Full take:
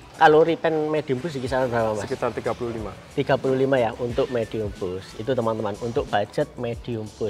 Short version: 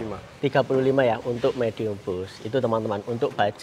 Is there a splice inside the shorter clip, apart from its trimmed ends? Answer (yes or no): no